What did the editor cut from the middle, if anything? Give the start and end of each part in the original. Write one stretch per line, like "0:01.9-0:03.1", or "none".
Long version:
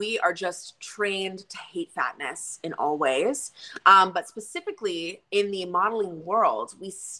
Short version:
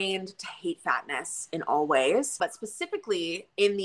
0:03.5-0:04.1